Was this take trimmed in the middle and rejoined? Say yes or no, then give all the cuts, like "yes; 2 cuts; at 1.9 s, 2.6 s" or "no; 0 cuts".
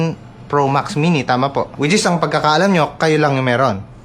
yes; 1 cut; at 1.7 s